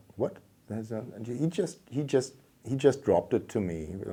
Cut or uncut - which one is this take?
uncut